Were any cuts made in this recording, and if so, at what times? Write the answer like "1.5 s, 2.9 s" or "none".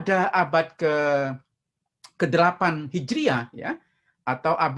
none